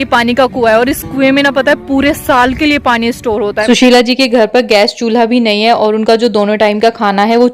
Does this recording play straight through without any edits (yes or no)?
no